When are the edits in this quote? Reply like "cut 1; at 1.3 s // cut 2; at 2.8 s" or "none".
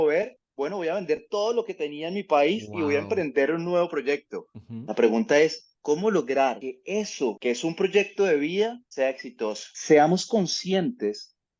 cut 1; at 9.7 s